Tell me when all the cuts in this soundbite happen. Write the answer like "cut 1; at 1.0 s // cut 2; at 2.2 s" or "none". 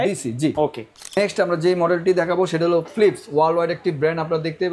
cut 1; at 1.2 s